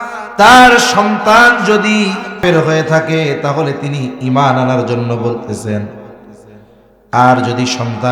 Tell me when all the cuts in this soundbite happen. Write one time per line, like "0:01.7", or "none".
0:02.4